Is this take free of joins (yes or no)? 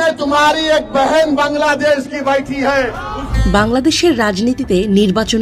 no